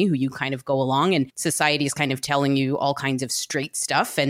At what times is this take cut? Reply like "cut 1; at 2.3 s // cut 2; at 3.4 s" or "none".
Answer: cut 1; at 1.3 s